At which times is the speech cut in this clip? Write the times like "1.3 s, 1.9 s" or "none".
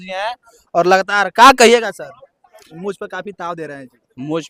none